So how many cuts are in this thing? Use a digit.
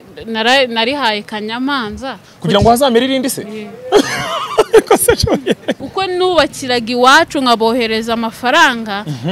1